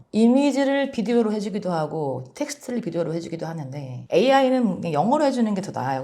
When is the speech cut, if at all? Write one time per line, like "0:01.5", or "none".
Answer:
0:04.0